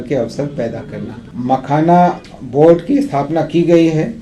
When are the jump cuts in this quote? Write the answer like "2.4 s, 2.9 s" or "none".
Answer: 1.2 s